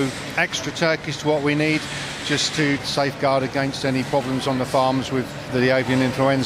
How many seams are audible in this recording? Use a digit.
2